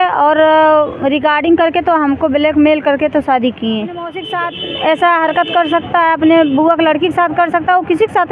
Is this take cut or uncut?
cut